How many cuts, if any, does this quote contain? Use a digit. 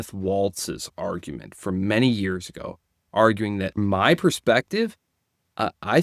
1